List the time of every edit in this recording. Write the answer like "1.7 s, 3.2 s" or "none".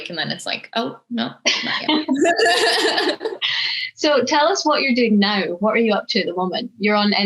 none